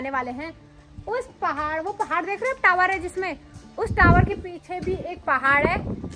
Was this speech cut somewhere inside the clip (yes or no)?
no